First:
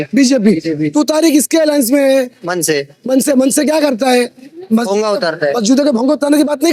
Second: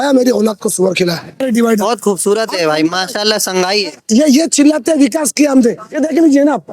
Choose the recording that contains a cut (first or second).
second